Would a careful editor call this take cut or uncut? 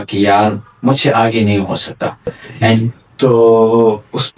cut